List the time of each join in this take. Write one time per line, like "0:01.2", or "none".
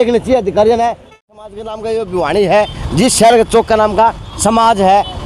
0:01.1